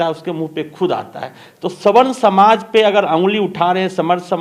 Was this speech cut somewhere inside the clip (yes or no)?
no